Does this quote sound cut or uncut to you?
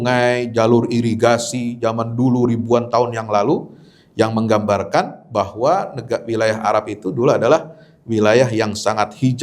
uncut